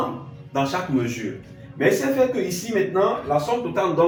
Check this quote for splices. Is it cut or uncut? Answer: uncut